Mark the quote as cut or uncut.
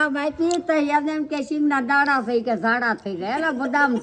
uncut